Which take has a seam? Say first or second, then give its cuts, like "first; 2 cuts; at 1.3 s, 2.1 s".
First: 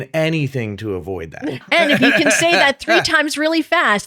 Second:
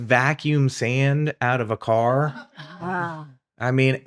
first; 1 cut; at 1.5 s